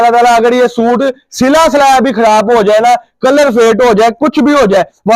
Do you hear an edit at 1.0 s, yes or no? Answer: no